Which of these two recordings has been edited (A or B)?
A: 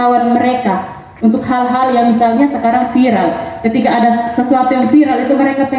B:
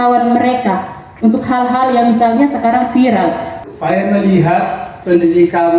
B